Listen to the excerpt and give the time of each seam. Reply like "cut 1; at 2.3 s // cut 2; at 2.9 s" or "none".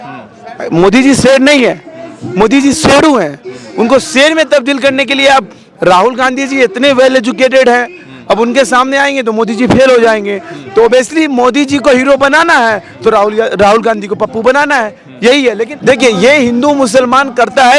cut 1; at 15.7 s